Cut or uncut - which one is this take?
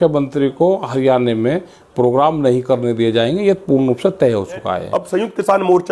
cut